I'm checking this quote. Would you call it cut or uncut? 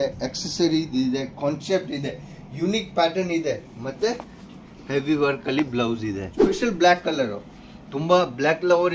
cut